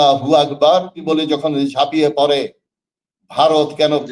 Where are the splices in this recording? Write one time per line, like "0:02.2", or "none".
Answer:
0:01.0